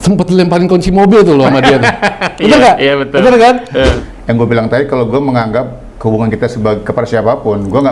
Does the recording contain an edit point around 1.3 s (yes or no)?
no